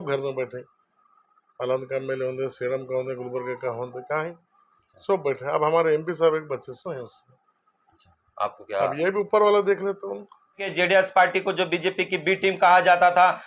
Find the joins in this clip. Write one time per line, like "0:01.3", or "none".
0:10.7